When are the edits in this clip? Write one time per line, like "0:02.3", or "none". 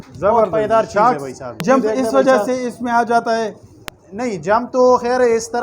0:01.6

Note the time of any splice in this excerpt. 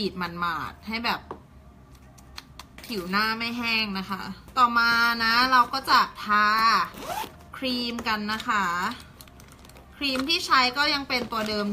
0:04.4

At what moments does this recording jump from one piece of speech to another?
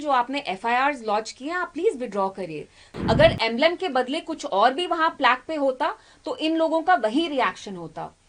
0:02.9

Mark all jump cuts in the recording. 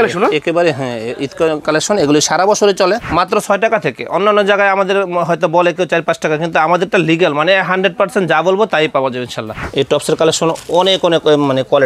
0:03.1
0:09.5

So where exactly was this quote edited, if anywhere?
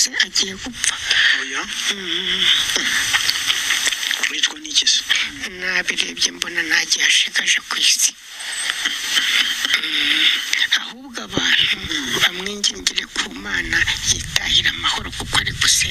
none

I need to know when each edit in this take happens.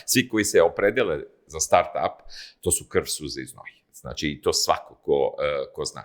none

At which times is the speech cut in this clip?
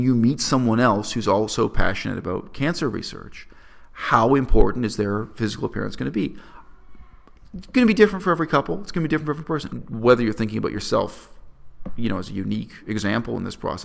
0:09.6

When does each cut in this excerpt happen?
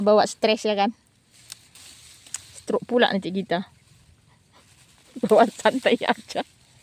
none

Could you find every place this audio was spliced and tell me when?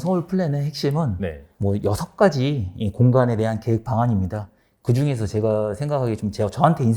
0:01.4

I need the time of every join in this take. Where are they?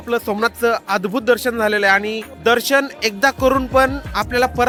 none

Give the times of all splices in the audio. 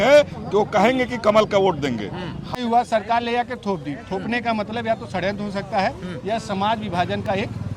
0:02.5

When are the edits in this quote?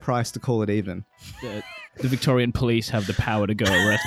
0:01.2

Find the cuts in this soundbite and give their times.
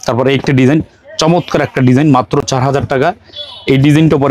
none

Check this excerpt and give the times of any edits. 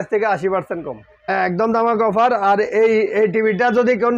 0:01.2

